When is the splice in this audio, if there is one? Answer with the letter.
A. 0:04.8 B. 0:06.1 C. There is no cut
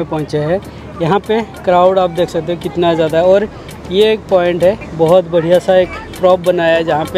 A